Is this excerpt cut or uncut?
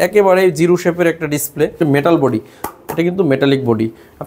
cut